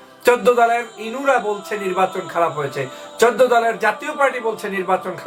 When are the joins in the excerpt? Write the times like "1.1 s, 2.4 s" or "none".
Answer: none